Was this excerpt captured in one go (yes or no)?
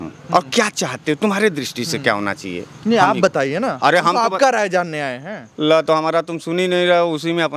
yes